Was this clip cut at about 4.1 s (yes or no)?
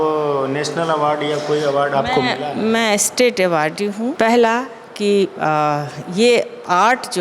yes